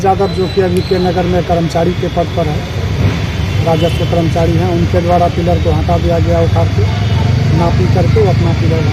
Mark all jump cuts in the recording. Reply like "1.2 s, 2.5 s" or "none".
none